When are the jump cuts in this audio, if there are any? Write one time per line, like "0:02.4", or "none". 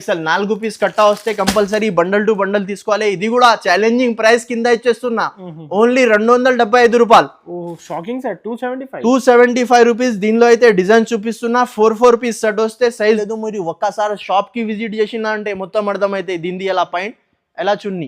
0:13.2